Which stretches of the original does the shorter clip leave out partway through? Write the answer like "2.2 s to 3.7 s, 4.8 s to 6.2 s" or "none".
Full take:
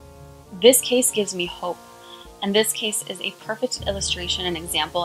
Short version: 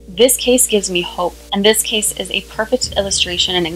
1.9 s to 2.3 s